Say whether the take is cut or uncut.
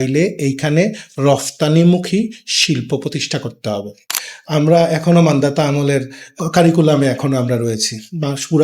cut